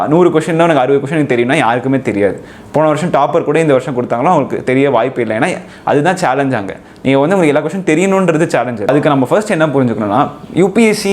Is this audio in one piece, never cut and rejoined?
no; 1 cut; at 8.9 s

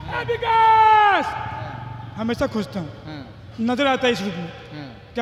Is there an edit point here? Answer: no; 0 cuts

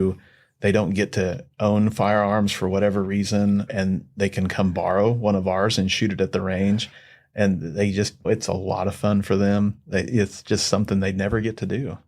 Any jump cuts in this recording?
yes; 2 cuts; at 3.7 s, 8.2 s

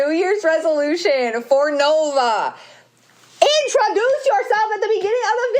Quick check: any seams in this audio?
no; 0 cuts

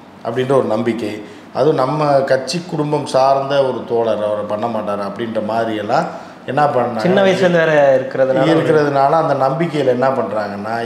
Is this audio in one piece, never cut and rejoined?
yes; 0 cuts

